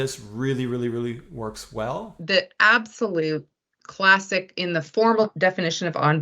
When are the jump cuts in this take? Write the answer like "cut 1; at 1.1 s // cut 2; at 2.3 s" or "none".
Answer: cut 1; at 2.2 s // cut 2; at 5.3 s